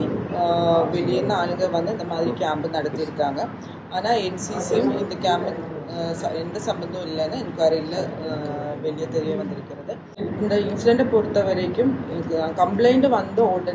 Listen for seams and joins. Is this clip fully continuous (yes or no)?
no